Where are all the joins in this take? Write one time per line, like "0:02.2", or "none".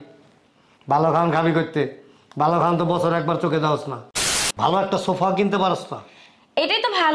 0:04.2

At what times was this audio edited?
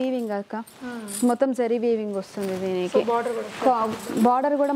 none

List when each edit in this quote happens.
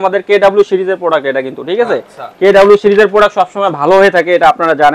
none

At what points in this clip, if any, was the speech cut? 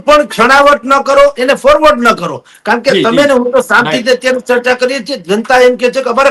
none

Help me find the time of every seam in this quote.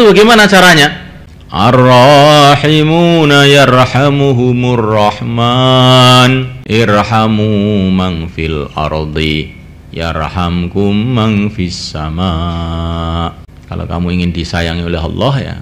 0:01.7
0:06.5
0:13.5

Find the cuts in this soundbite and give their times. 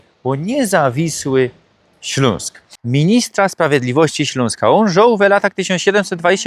0:02.7

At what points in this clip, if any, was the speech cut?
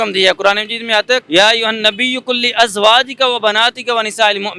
0:01.2

